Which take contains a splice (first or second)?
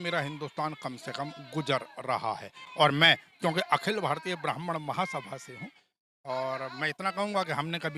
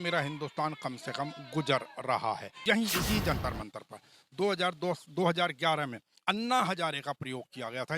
second